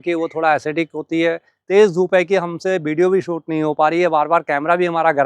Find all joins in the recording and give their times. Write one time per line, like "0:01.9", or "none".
0:01.5